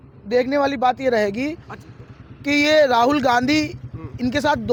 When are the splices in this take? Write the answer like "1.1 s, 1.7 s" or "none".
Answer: none